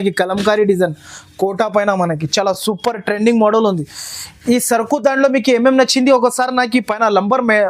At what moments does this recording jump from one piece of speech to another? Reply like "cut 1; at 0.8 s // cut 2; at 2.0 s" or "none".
none